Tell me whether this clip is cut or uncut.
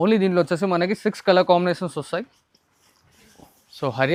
uncut